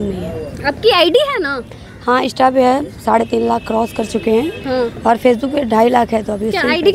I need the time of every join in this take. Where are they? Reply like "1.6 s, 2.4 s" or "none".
none